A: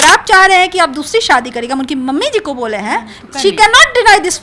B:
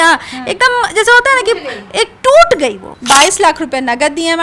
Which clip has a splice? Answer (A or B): B